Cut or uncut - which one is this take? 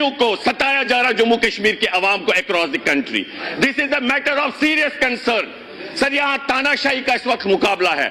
uncut